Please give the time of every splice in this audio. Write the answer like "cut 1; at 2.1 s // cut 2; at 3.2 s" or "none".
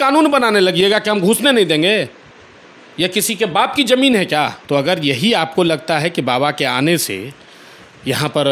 cut 1; at 4.6 s